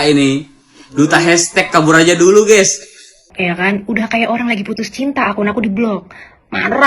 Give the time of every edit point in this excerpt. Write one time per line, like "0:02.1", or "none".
0:03.3